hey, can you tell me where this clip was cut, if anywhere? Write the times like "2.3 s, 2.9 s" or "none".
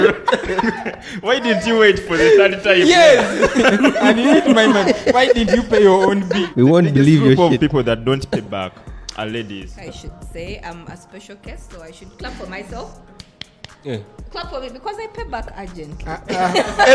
6.5 s, 9.8 s